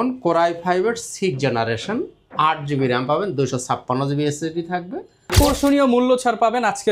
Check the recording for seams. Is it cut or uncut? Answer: cut